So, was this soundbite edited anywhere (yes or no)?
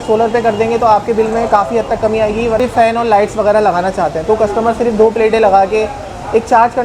yes